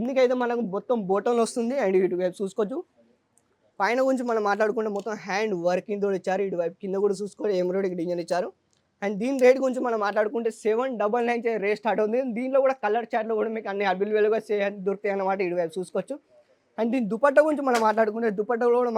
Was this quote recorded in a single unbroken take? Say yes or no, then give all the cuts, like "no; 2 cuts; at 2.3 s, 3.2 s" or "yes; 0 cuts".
yes; 0 cuts